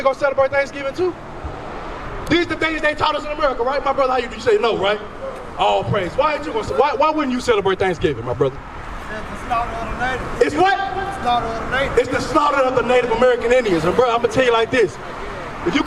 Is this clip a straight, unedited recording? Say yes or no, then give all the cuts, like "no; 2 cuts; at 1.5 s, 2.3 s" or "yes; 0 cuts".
yes; 0 cuts